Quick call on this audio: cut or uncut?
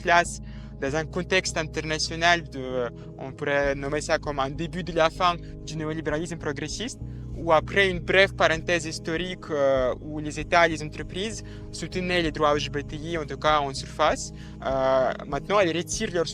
uncut